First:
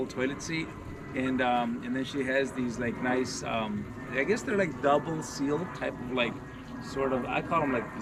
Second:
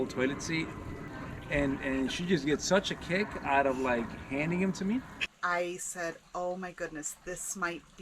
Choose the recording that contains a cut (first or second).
second